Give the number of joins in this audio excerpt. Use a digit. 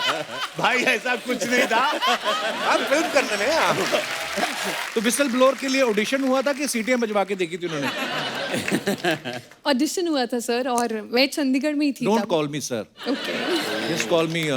1